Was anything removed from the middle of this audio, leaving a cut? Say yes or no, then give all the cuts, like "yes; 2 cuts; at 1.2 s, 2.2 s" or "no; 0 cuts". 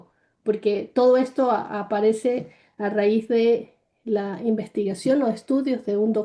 no; 0 cuts